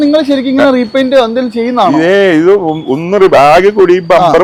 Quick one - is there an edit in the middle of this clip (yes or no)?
no